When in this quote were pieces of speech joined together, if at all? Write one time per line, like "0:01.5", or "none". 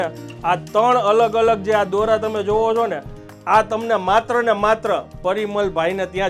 none